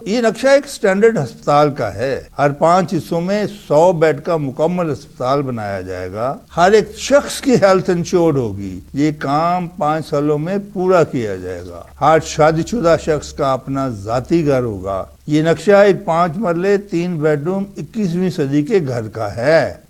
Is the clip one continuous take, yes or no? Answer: yes